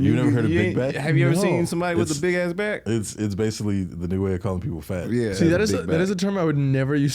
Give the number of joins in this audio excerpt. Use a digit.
1